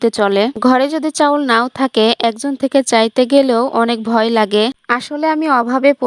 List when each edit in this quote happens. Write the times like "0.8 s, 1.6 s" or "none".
4.8 s